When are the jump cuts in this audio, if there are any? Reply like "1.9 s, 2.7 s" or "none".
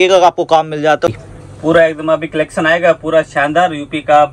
1.1 s